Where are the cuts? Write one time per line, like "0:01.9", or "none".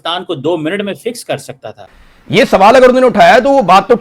0:01.9